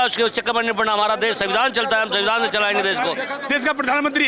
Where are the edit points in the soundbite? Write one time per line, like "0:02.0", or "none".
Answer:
0:03.3